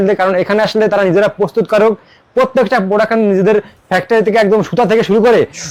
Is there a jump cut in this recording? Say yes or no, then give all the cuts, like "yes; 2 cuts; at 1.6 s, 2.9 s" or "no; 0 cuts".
no; 0 cuts